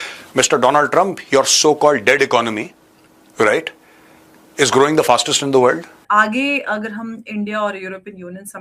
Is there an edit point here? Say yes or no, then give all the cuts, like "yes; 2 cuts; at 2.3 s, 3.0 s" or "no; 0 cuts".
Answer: yes; 1 cut; at 6.0 s